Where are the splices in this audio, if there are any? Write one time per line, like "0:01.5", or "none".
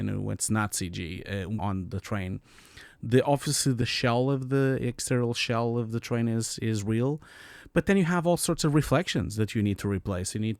0:01.5
0:03.8